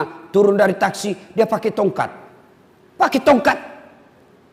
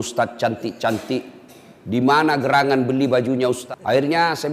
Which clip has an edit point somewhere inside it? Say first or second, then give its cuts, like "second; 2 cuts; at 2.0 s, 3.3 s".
second; 1 cut; at 3.6 s